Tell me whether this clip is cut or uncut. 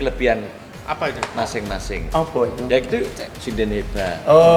uncut